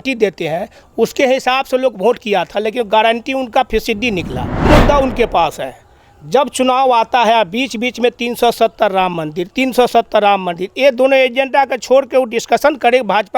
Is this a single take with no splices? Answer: no; 1 cut; at 4.7 s

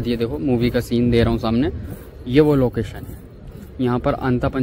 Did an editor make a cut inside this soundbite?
no; 0 cuts

